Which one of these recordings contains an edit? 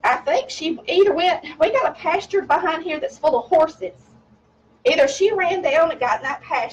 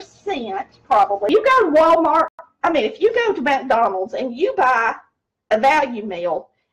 second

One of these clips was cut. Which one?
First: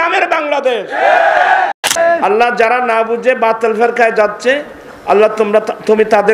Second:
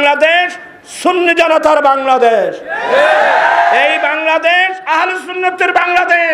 first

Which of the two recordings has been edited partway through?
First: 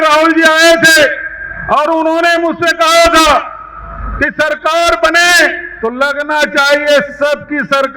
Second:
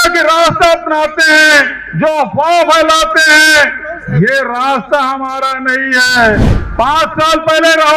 second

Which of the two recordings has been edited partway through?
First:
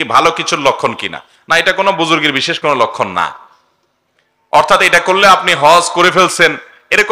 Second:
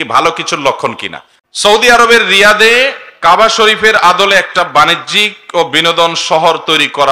second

